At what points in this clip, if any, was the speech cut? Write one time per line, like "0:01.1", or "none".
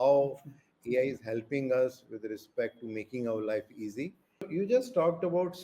0:04.5